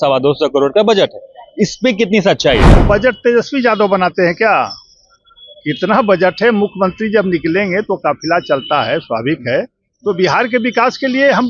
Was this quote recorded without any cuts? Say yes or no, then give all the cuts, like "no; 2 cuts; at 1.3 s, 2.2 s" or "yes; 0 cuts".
no; 1 cut; at 2.7 s